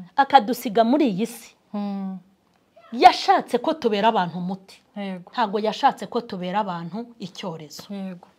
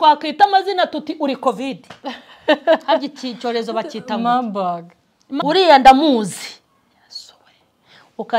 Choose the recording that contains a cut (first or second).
second